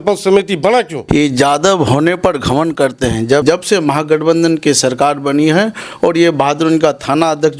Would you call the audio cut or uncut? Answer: cut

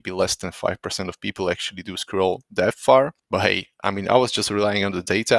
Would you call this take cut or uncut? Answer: cut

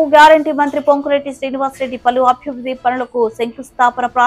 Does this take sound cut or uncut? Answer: uncut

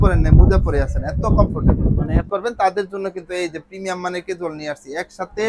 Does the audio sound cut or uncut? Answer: cut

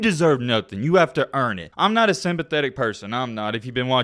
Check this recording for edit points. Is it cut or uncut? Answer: cut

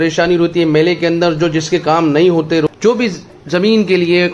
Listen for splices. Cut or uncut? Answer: cut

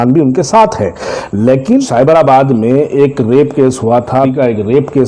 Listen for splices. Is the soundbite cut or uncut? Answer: cut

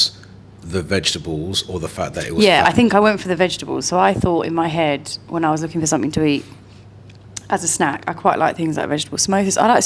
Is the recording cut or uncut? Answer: uncut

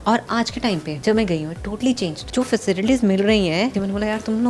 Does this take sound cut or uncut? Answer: cut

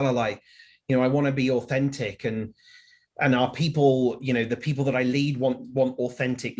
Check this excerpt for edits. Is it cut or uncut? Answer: uncut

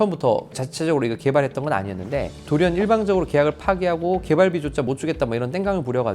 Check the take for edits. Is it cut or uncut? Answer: cut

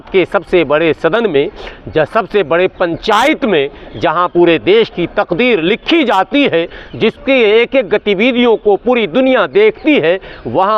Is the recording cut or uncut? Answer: uncut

